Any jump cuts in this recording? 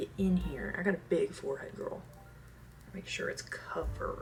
no; 0 cuts

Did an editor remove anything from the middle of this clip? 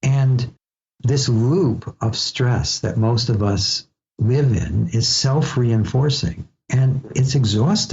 yes; 1 cut; at 0.9 s

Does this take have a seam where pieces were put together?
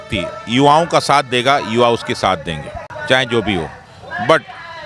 yes; 1 cut; at 2.9 s

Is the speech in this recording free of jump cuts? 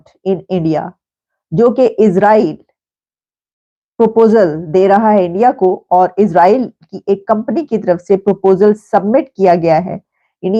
yes; 0 cuts

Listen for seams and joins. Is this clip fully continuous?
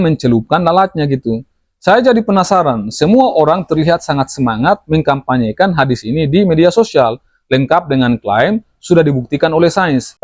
yes; 0 cuts

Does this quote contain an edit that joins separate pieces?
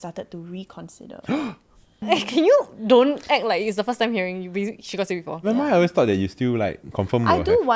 yes; 2 cuts; at 2.0 s, 5.5 s

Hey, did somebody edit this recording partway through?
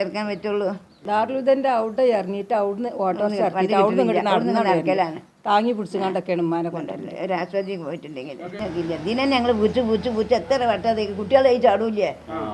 yes; 2 cuts; at 1.0 s, 8.4 s

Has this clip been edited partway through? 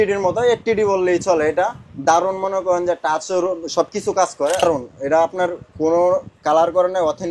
yes; 1 cut; at 4.6 s

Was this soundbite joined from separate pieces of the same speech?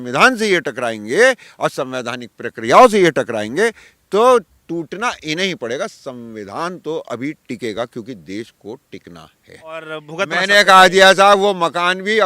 yes; 1 cut; at 9.9 s

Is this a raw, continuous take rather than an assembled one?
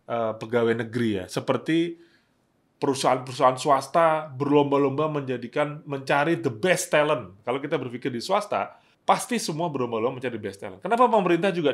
no; 2 cuts; at 7.4 s, 8.8 s

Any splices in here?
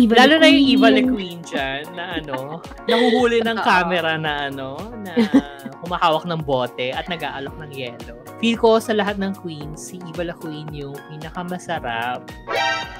no; 0 cuts

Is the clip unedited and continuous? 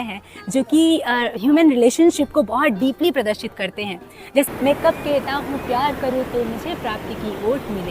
no; 1 cut; at 4.5 s

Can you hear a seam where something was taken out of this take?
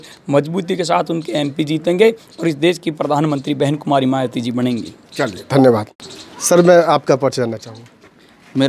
no; 0 cuts

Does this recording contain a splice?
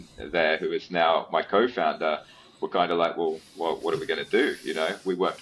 no; 0 cuts

